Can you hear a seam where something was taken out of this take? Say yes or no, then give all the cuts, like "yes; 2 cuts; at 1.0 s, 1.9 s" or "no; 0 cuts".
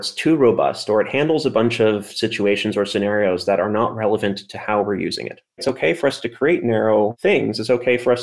yes; 2 cuts; at 5.6 s, 7.2 s